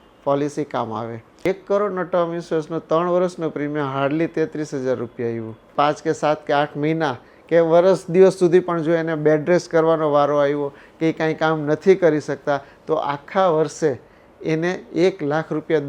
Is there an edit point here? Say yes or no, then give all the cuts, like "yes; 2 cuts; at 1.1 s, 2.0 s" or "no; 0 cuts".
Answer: yes; 2 cuts; at 1.4 s, 5.7 s